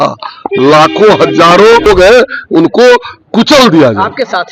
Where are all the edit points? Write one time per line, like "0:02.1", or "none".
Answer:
0:01.9